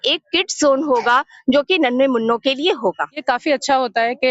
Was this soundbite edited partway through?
yes; 1 cut; at 3.1 s

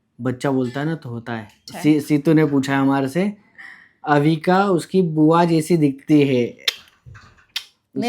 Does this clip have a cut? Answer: yes; 1 cut; at 1.5 s

